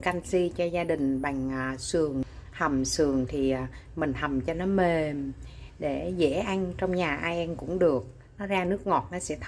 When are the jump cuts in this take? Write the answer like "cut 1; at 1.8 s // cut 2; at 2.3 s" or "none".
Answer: cut 1; at 2.3 s